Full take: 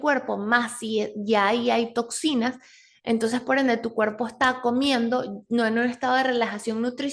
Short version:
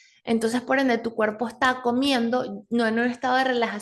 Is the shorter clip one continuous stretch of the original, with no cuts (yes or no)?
yes